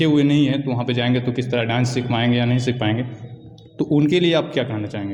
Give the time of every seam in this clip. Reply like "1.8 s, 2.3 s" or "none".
none